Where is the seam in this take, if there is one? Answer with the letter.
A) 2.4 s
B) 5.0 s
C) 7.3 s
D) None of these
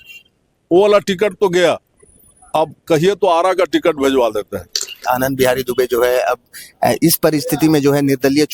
B